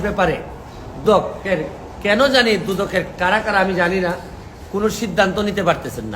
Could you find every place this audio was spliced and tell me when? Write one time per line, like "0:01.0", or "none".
0:01.0